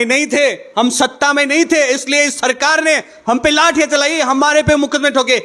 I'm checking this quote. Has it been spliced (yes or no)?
no